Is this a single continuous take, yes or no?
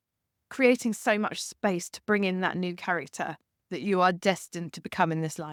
yes